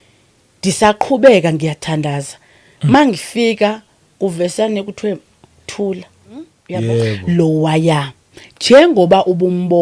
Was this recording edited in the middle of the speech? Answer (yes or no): yes